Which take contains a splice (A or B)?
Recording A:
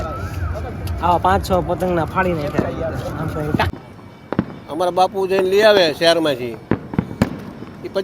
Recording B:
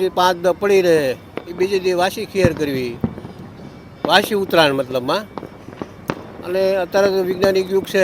A